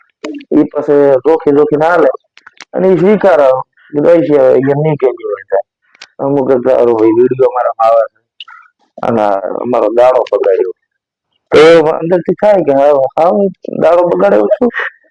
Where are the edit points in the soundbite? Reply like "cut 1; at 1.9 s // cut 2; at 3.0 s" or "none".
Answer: none